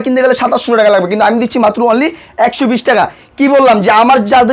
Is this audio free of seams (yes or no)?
yes